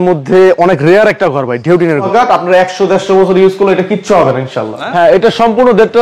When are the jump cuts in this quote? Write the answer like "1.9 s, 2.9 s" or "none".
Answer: 2.1 s, 4.9 s